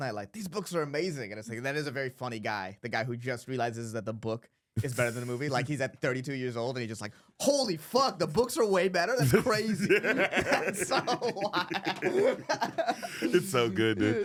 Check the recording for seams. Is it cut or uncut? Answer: uncut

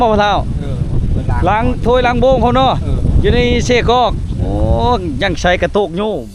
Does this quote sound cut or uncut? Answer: uncut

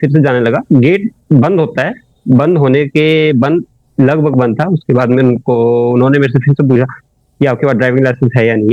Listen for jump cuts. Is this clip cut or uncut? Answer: uncut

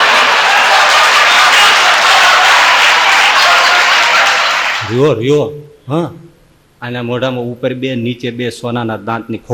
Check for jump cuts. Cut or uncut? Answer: cut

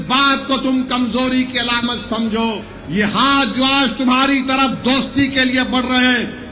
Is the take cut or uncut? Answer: cut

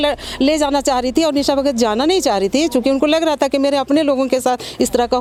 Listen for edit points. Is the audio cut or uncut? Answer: uncut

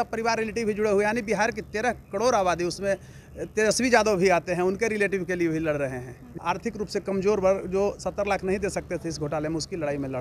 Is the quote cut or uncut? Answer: cut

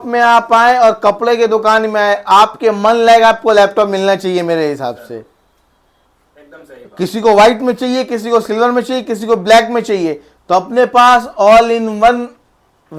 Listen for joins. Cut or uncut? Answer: uncut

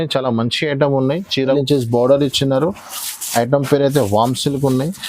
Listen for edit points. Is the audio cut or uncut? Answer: cut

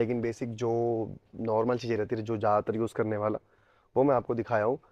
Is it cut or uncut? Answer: uncut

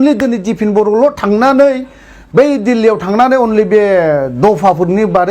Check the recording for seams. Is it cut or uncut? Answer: uncut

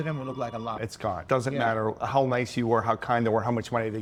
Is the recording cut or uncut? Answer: uncut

